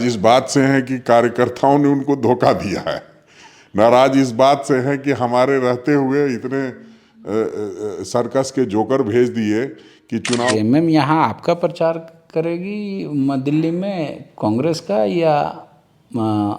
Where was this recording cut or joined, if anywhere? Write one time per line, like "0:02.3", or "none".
0:10.5